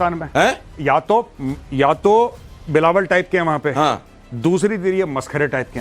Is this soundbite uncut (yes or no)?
yes